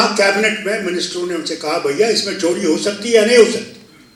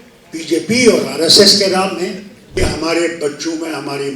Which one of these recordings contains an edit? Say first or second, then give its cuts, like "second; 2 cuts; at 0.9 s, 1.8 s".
second; 1 cut; at 2.5 s